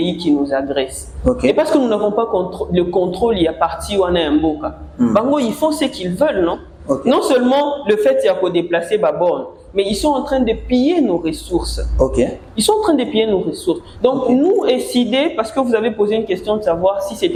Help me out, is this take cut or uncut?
uncut